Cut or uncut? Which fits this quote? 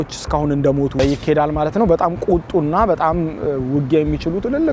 cut